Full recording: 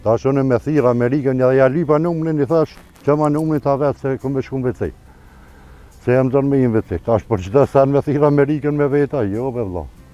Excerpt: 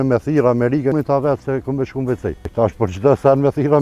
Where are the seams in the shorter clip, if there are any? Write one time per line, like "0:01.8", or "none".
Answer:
0:00.9
0:02.4